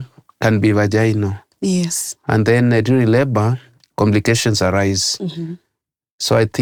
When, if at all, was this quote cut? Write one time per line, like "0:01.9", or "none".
none